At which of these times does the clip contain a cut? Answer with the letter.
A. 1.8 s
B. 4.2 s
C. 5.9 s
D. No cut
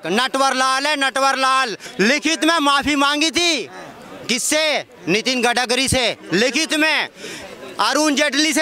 A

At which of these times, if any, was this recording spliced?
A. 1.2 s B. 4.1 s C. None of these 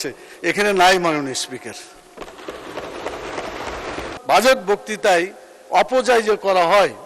B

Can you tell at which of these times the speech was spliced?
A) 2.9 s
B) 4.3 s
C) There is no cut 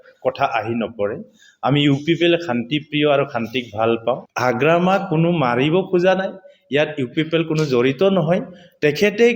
B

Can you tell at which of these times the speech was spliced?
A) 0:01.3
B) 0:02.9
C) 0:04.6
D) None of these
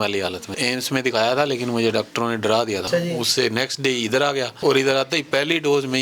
B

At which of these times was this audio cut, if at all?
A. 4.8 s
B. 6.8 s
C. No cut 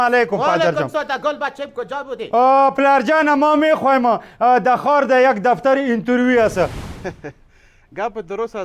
B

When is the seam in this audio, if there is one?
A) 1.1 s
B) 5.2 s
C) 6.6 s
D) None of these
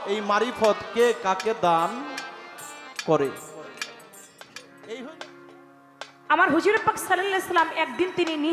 B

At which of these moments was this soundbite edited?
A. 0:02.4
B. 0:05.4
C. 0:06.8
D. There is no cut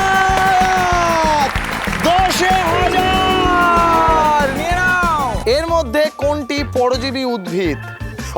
B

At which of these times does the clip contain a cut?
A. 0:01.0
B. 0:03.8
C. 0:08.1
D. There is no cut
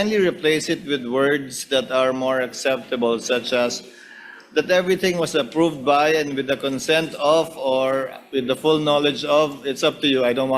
D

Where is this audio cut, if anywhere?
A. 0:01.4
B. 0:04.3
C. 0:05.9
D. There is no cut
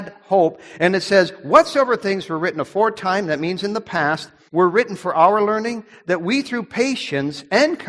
B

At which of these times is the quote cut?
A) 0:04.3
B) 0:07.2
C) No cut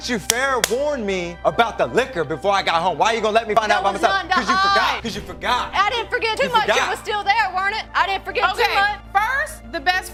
C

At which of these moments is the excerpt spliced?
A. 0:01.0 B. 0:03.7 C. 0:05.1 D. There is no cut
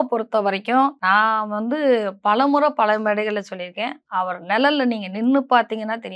A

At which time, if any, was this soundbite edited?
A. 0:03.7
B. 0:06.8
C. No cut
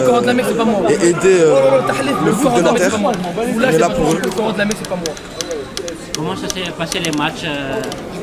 C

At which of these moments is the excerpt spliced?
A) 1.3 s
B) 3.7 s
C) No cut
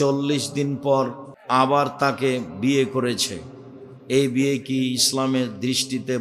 A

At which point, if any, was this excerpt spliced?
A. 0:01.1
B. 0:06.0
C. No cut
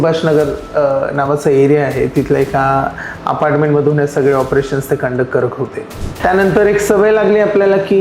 B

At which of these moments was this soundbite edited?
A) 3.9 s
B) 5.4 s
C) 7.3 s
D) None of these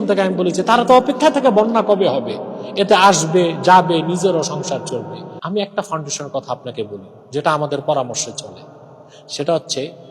B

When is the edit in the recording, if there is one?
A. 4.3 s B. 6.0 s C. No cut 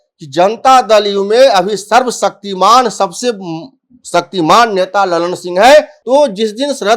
B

